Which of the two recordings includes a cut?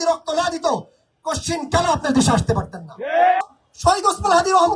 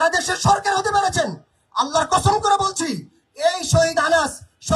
first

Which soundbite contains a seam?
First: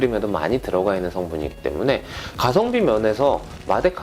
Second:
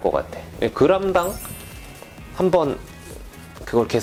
first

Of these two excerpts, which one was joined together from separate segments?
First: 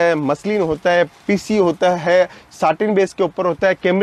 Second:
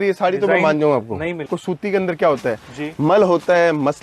second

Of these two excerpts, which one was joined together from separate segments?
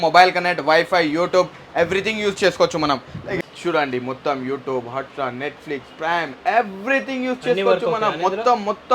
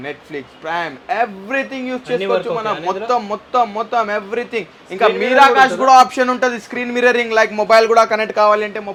first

